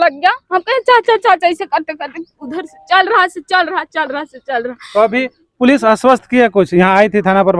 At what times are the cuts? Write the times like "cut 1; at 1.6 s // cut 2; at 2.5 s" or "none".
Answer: none